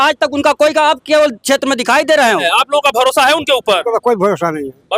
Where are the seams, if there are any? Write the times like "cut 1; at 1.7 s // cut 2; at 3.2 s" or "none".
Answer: cut 1; at 2.4 s